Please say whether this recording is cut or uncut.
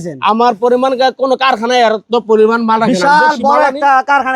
uncut